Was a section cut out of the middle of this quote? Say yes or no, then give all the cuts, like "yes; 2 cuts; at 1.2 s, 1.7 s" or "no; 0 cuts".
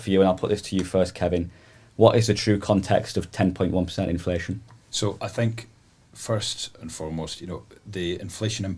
no; 0 cuts